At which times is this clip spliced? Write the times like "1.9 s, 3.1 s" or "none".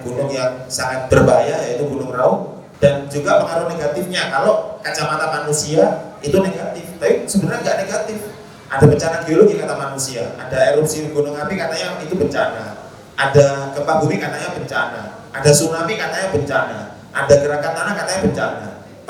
1.0 s, 2.6 s